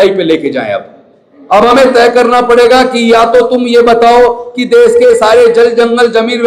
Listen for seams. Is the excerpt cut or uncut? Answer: uncut